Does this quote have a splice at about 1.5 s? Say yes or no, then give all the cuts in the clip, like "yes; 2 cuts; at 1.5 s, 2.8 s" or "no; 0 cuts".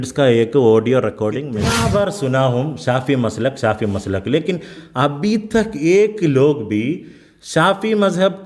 yes; 1 cut; at 1.5 s